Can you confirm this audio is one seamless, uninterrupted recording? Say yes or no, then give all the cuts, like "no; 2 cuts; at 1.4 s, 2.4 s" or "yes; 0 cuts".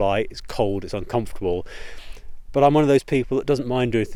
yes; 0 cuts